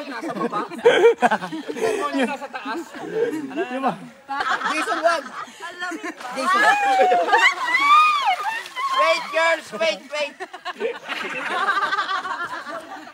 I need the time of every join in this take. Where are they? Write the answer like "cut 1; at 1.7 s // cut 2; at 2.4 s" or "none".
cut 1; at 4.4 s